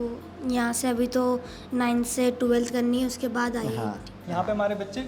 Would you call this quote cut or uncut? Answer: cut